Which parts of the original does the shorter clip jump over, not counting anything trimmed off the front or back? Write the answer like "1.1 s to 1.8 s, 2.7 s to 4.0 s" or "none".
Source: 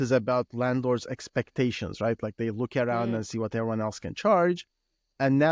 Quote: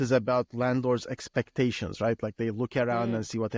none